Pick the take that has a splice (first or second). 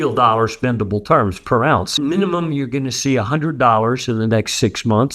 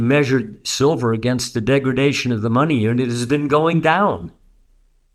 first